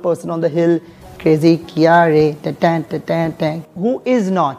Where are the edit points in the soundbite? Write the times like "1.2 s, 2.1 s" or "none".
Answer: 1.1 s, 3.6 s